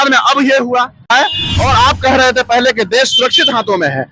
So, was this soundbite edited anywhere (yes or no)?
yes